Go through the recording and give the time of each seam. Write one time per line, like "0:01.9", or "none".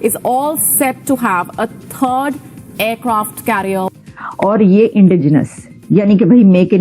0:03.9